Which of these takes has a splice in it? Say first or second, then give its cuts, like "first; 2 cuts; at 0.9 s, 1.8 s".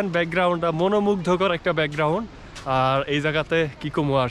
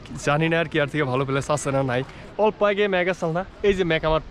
second; 1 cut; at 2.2 s